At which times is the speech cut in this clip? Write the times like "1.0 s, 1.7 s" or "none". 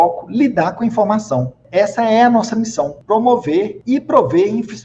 1.6 s, 3.0 s, 3.8 s